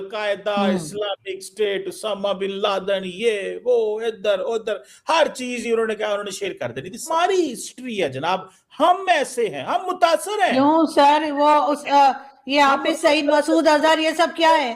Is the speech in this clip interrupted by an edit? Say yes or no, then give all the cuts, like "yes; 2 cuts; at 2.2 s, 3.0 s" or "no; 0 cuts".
yes; 1 cut; at 7.1 s